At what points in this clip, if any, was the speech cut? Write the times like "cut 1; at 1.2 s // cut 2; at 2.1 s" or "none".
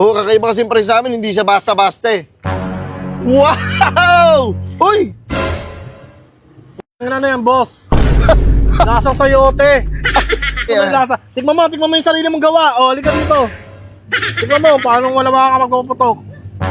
cut 1; at 10.7 s